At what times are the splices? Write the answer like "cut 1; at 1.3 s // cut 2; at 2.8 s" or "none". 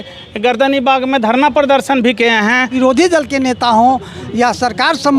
cut 1; at 2.7 s